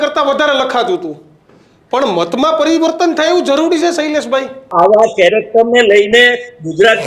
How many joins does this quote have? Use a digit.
1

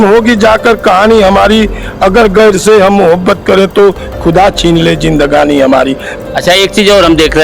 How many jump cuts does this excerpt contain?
1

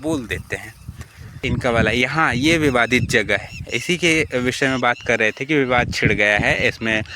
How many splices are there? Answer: 1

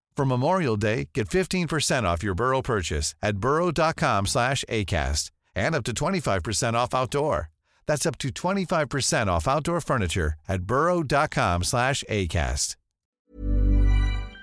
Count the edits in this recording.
1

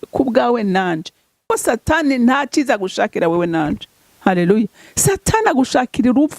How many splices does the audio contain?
1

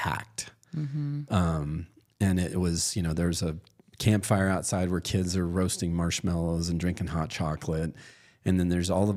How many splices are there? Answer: 0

